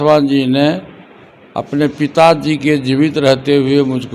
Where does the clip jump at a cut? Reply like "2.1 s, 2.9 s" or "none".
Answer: none